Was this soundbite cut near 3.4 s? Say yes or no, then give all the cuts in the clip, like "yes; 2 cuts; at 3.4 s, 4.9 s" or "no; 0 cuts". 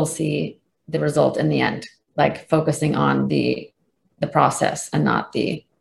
no; 0 cuts